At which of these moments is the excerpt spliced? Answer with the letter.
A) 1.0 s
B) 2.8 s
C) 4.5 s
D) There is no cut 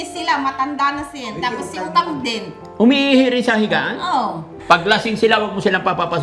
C